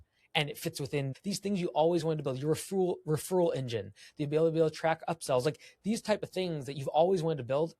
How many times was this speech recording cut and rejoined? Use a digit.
1